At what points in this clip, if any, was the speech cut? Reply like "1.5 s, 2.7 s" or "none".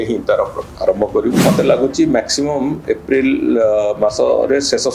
1.4 s